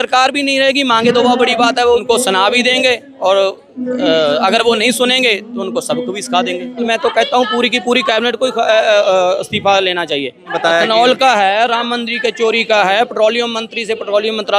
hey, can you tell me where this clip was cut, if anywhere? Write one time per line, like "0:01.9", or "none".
0:02.0
0:06.9
0:10.5